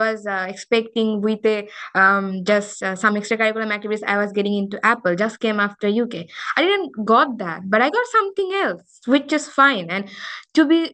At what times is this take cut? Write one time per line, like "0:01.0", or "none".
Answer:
none